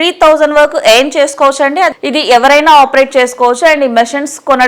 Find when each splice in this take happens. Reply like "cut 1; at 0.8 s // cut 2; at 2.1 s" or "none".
cut 1; at 2.0 s